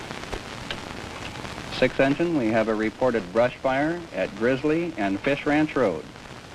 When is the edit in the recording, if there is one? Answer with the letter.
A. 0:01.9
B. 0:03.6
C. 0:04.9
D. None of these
B